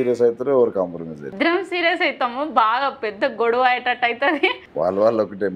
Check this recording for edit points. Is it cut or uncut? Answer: cut